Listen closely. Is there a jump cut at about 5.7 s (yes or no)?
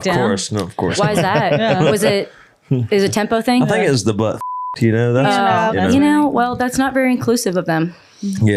yes